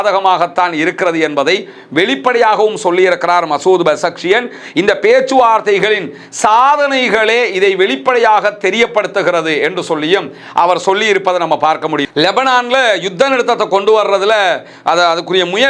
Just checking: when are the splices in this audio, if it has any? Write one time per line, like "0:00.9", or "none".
0:12.0